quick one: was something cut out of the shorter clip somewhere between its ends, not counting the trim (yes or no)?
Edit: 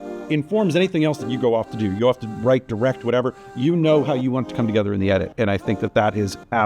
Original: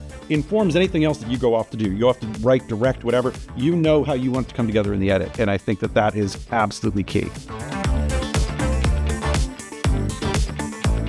no